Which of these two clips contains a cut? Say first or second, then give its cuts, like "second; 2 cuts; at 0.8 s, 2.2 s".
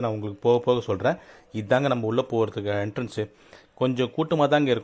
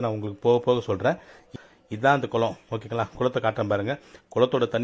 second; 1 cut; at 1.6 s